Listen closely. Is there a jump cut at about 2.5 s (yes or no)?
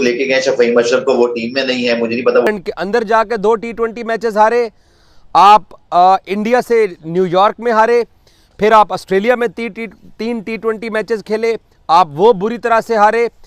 yes